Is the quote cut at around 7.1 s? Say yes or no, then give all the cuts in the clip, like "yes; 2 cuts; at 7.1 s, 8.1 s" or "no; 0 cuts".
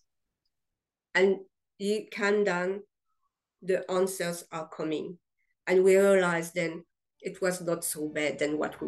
no; 1 cut; at 2.1 s